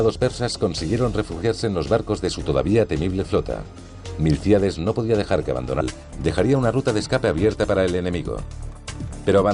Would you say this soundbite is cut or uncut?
uncut